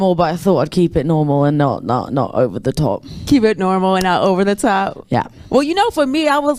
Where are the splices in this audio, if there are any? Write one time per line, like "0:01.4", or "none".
none